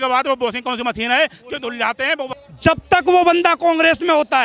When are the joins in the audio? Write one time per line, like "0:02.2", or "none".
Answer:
0:02.3